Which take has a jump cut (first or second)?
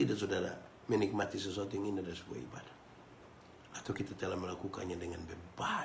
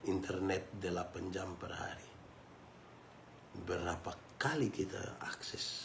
first